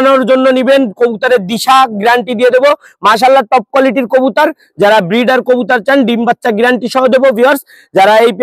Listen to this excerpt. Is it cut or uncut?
uncut